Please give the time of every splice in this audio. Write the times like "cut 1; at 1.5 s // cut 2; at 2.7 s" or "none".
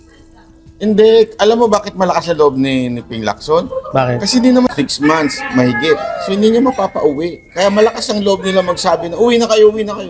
cut 1; at 4.7 s